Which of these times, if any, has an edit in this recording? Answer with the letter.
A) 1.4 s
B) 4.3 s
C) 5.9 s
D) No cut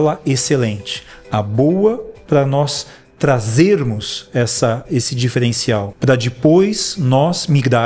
C